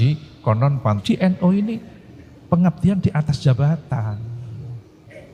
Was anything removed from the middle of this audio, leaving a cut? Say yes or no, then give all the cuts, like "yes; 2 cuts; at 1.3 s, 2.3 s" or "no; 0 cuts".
yes; 1 cut; at 1.0 s